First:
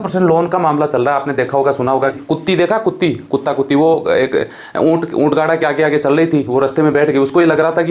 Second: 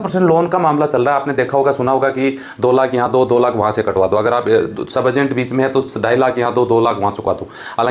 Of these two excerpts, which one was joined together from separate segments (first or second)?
first